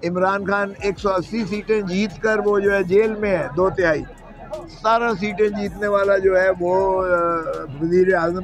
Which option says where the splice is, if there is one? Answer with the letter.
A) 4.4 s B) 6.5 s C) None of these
C